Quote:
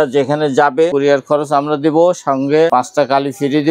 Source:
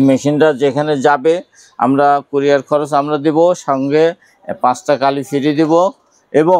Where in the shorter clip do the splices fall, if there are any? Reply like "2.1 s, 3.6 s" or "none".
0.9 s, 2.7 s